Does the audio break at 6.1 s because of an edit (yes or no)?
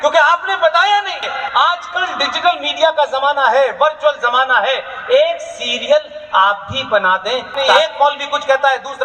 no